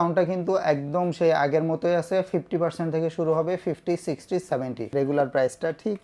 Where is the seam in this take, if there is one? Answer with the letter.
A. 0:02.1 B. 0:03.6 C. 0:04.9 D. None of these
C